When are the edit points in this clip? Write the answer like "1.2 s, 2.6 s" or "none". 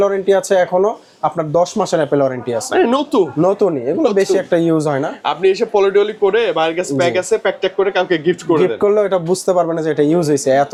none